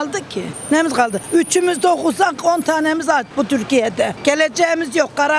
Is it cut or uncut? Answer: uncut